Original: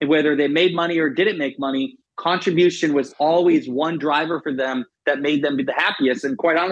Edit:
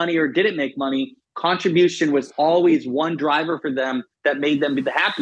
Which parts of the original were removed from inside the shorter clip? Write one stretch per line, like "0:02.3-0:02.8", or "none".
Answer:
none